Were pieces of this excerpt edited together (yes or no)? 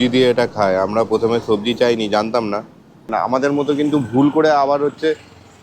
yes